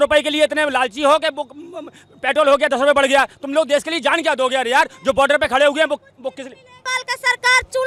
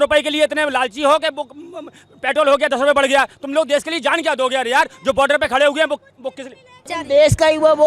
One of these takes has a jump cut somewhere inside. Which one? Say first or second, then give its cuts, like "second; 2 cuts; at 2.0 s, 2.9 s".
second; 1 cut; at 6.9 s